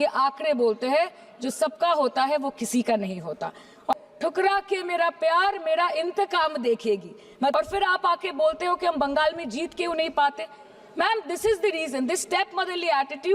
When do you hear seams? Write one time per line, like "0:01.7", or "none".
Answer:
0:03.9
0:07.5

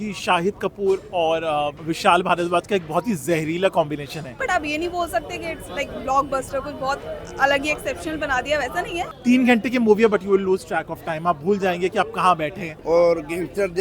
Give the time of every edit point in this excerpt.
0:01.8
0:04.3
0:09.1
0:12.7

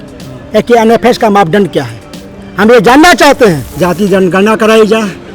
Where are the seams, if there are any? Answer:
0:03.7

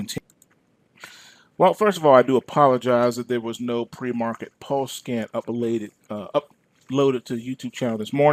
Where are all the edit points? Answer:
none

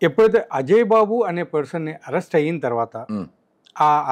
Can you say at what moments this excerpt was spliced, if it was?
none

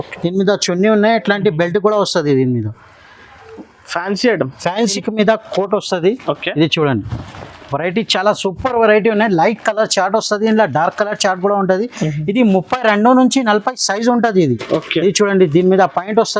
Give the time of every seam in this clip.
0:04.8

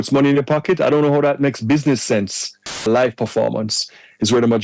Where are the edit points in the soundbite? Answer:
0:02.9

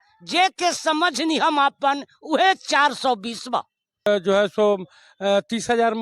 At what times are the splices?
0:04.1

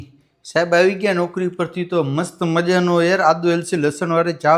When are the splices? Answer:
none

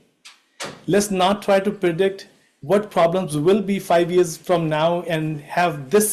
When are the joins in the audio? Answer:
none

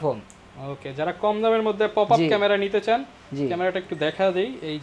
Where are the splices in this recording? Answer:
none

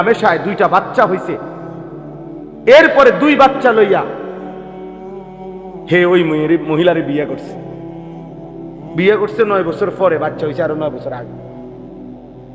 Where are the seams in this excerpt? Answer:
none

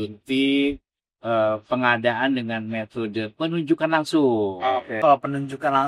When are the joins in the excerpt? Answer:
0:05.0

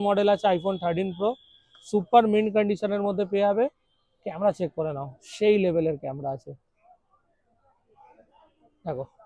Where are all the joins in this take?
none

